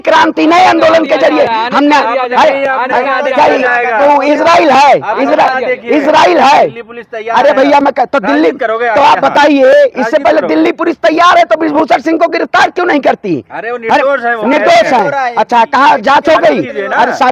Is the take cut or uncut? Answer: uncut